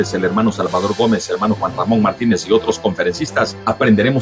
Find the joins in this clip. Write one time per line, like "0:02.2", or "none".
0:01.5